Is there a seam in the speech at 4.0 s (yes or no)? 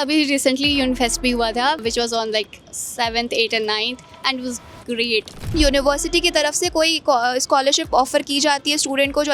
no